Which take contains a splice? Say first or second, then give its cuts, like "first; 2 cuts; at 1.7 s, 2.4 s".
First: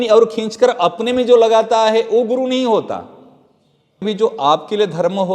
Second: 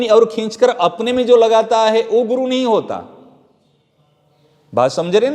first; 1 cut; at 4.0 s